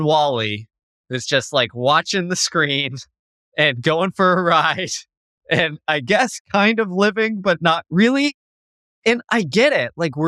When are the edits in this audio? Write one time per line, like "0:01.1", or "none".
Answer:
none